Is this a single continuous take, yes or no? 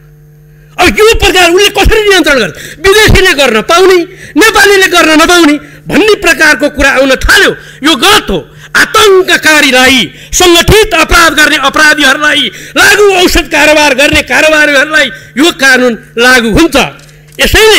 yes